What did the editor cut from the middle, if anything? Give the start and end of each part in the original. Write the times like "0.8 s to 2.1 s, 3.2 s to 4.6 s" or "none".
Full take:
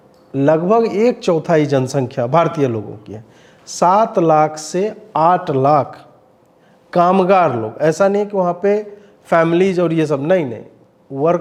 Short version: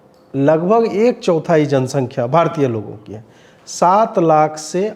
none

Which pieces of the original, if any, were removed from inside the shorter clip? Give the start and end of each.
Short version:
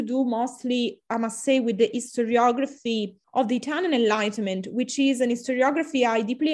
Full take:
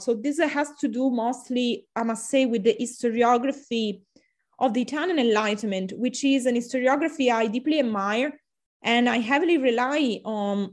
4.0 s to 4.4 s

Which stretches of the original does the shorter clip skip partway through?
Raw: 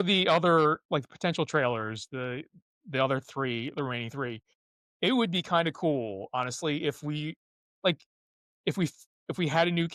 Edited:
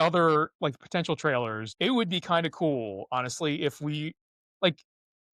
1.9 s to 4.9 s

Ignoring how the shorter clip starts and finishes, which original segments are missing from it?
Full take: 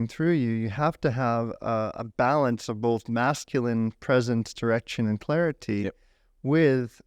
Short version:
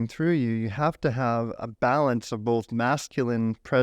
1.6 s to 1.9 s

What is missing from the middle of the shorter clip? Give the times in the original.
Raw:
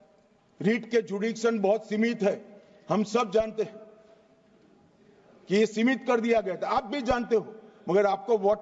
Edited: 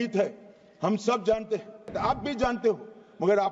4.0 s to 6.6 s

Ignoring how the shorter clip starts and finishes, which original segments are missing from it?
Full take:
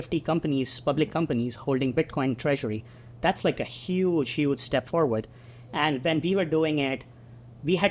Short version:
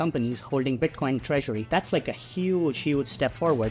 2.8 s to 3.1 s

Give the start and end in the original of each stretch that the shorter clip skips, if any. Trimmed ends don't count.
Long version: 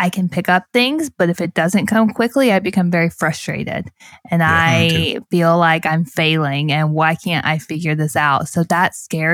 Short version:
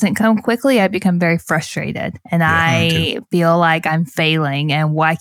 3.8 s to 4.1 s

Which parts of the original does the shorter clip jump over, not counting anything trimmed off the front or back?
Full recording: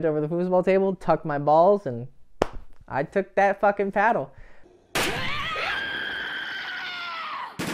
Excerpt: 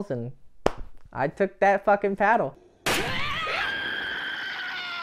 4.4 s to 4.8 s

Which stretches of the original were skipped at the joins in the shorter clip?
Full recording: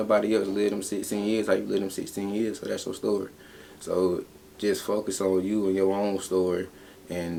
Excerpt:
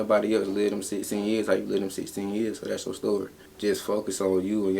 3.4 s to 4.4 s

